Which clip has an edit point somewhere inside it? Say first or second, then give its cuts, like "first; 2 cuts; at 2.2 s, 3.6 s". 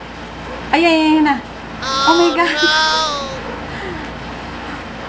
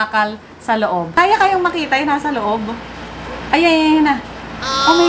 second; 1 cut; at 1.1 s